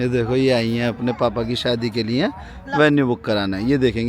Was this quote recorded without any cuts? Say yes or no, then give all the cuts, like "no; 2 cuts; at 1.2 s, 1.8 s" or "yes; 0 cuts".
yes; 0 cuts